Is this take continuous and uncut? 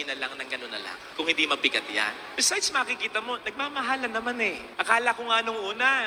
yes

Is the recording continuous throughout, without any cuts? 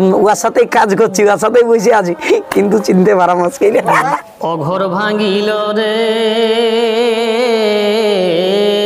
no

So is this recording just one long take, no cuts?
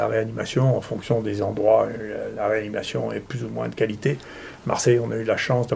yes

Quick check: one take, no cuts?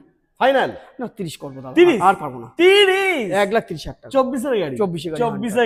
yes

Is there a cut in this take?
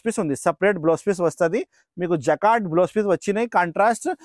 no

